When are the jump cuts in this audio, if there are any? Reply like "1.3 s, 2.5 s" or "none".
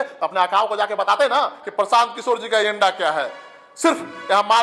1.6 s